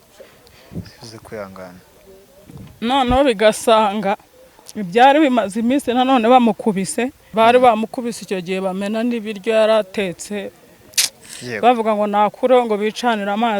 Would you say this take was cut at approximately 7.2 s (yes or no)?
yes